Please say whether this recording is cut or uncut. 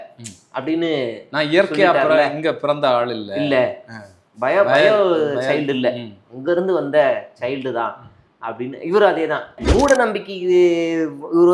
cut